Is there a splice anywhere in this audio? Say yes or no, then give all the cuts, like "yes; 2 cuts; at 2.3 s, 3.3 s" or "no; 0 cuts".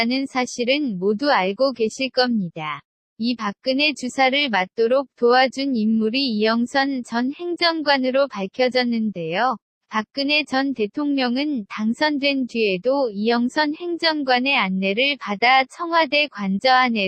no; 0 cuts